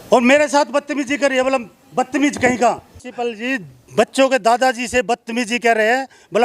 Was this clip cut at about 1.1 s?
no; 1 cut; at 3.0 s

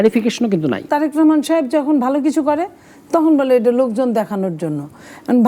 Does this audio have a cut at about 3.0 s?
no; 1 cut; at 0.9 s

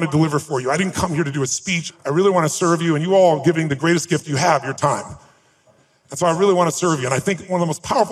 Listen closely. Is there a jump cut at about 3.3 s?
no; 2 cuts; at 1.8 s, 5.6 s

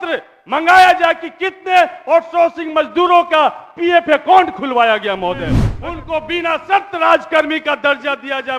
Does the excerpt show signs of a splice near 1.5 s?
no; 1 cut; at 5.7 s

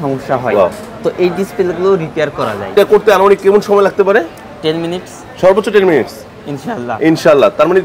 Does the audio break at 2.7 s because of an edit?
yes; 1 cut; at 2.7 s

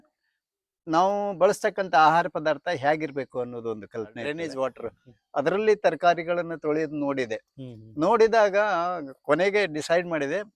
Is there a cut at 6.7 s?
no; 1 cut; at 4.2 s

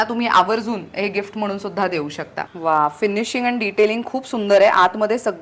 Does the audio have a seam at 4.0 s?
no; 1 cut; at 2.4 s

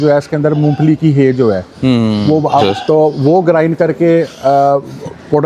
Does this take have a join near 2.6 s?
yes; 1 cut; at 2.6 s

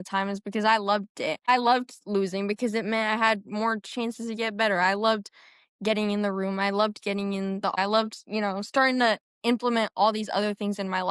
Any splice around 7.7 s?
yes; 2 cuts; at 1.5 s, 7.7 s

